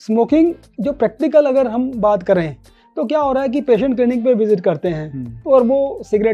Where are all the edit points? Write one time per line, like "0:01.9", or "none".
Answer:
none